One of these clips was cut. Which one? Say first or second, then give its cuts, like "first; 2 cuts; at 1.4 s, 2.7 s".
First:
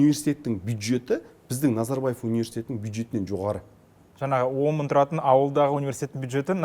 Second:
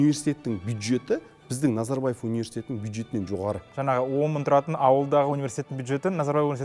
second; 1 cut; at 3.7 s